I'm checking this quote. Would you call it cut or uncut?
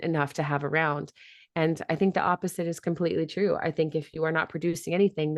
uncut